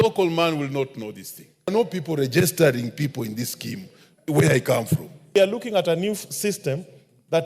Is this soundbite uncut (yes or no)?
no